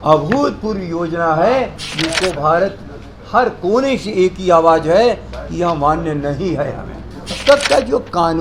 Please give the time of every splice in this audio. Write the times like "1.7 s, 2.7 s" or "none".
7.4 s